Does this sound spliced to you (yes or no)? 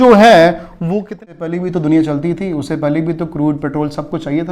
yes